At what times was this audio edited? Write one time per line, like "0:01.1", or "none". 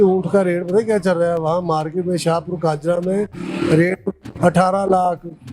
none